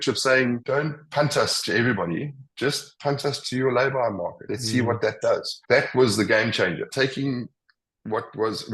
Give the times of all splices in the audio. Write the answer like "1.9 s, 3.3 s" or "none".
4.5 s, 5.5 s, 6.9 s